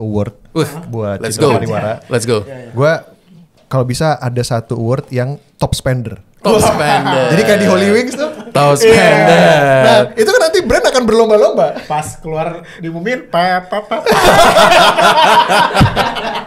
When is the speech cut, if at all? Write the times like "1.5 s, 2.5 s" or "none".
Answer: none